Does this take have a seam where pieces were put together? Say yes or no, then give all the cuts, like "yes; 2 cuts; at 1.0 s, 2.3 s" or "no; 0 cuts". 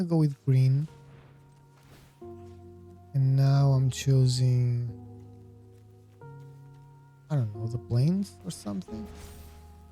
yes; 4 cuts; at 0.9 s, 2.9 s, 5.6 s, 7.2 s